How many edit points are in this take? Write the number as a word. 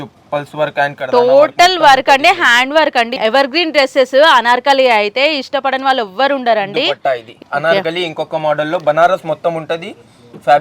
two